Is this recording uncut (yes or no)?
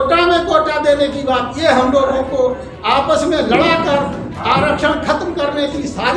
yes